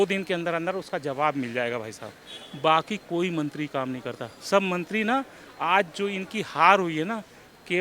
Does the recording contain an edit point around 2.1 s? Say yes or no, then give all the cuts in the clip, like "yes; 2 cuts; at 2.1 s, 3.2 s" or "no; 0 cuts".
no; 0 cuts